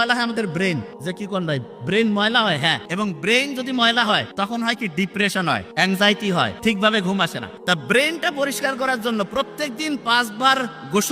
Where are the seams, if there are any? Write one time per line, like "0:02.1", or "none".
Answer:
0:00.9
0:02.8
0:04.3
0:05.7
0:06.5
0:07.5